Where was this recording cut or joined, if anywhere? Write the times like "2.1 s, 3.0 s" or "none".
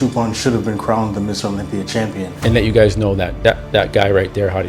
2.3 s